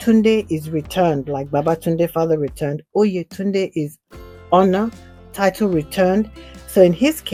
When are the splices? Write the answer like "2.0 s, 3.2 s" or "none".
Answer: none